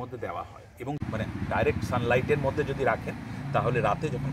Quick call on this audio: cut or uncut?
cut